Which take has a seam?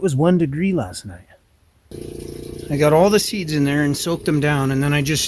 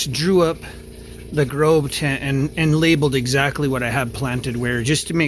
first; 1 cut; at 1.9 s

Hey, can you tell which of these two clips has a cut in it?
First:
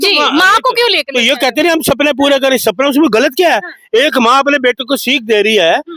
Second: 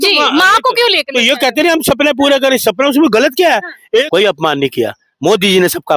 second; 1 cut; at 4.1 s

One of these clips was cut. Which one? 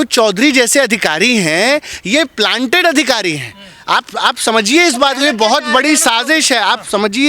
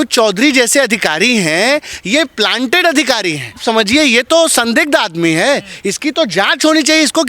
second; 1 cut; at 3.6 s

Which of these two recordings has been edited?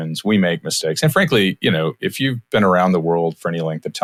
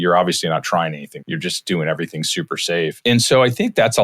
second; 2 cuts; at 1.1 s, 3.0 s

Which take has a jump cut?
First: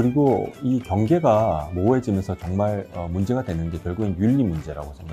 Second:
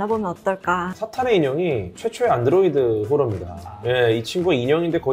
second; 3 cuts; at 1.0 s, 2.0 s, 3.7 s

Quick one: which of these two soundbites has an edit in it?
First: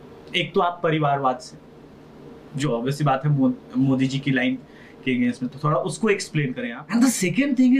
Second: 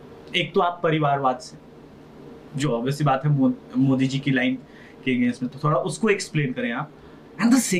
first; 1 cut; at 6.7 s

